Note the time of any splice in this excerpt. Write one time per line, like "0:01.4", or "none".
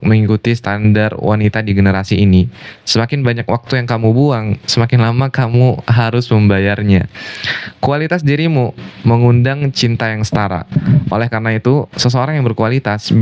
none

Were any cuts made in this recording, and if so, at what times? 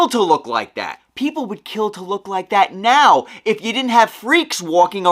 0:01.0

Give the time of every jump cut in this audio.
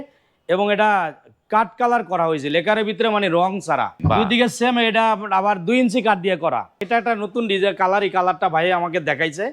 0:04.0
0:06.8

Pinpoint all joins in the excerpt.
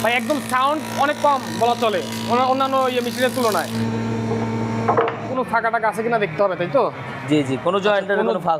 0:03.8
0:05.3

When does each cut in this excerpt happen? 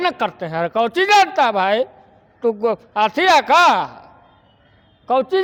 none

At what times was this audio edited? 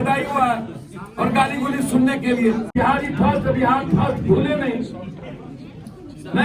0:02.7

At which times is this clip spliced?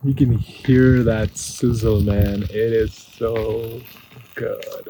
none

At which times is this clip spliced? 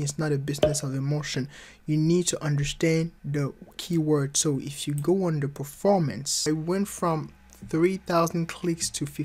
0:06.4

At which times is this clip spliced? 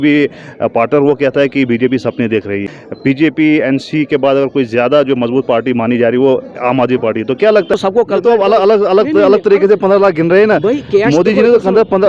0:02.8
0:07.7

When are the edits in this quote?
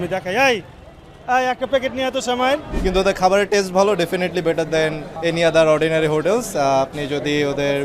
0:02.7
0:05.1

